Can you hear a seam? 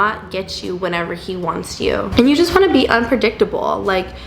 no; 0 cuts

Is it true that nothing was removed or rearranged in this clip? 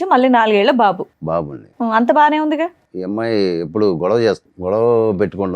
no; 2 cuts; at 2.9 s, 4.5 s

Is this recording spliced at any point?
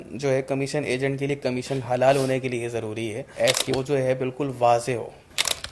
yes; 1 cut; at 3.2 s

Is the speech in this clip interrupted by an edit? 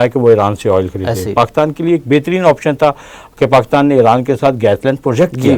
no; 0 cuts

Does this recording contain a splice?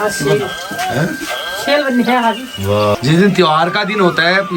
no; 0 cuts

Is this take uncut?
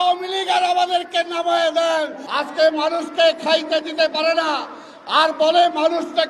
no; 1 cut; at 2.2 s

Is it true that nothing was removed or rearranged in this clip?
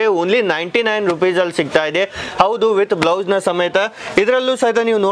yes; 0 cuts

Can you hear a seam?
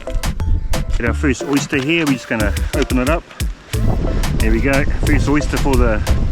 yes; 2 cuts; at 1.0 s, 3.8 s

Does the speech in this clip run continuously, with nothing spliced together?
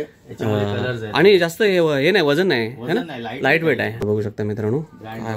no; 1 cut; at 4.0 s

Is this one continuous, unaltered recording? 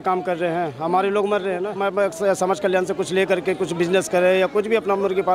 no; 1 cut; at 1.7 s

